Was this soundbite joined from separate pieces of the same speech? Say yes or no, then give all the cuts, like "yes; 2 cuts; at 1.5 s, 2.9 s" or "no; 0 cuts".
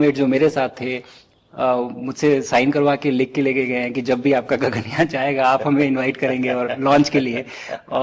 no; 0 cuts